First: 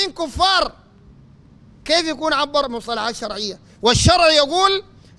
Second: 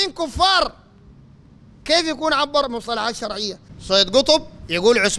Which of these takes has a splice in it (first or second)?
second